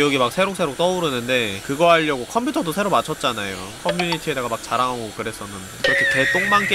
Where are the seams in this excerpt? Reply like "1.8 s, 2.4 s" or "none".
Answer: 1.6 s

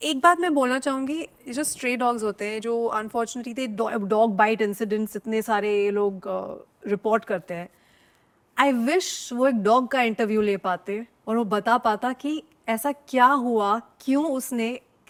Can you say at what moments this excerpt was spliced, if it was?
none

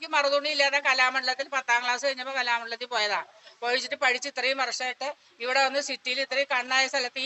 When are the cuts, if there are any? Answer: none

